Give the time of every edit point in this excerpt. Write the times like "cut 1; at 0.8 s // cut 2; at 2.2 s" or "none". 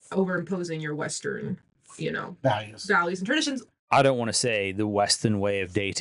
cut 1; at 3.6 s